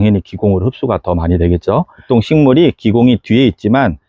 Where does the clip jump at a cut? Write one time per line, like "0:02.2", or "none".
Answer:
0:02.0